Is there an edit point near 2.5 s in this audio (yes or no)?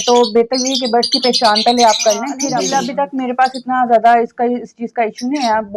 yes